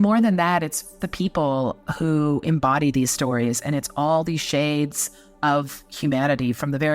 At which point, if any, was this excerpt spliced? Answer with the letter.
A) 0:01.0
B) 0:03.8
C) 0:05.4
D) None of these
A